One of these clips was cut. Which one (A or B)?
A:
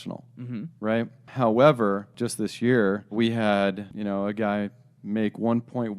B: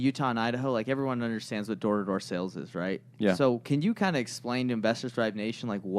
A